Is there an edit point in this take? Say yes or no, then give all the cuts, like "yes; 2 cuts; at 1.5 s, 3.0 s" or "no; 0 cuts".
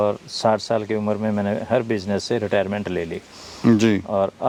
no; 0 cuts